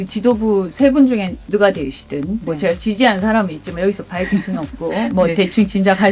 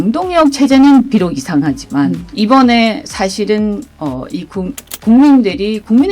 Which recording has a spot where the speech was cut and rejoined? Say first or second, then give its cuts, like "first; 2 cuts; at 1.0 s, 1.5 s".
second; 1 cut; at 2.2 s